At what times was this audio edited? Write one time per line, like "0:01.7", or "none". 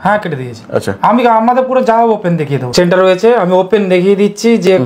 0:02.7